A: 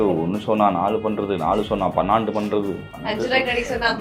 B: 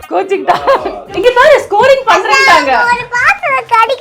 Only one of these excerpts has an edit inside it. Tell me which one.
B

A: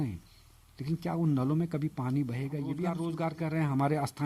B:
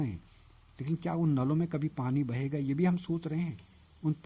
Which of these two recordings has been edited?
A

